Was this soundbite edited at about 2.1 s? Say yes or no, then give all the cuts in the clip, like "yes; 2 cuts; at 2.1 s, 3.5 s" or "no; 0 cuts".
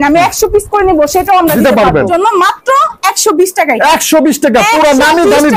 yes; 1 cut; at 2.1 s